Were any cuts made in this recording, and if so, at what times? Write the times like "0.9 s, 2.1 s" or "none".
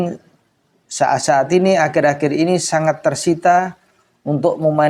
none